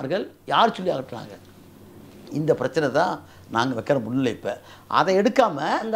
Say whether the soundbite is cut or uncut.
uncut